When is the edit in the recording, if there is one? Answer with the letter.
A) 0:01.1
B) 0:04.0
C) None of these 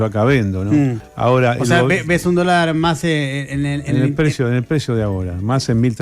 A